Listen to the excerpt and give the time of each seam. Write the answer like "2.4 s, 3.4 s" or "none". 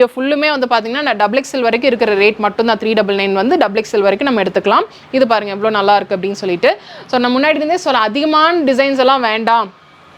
none